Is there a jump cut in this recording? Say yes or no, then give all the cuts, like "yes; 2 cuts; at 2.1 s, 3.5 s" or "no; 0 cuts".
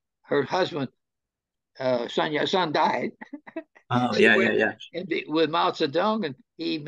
no; 0 cuts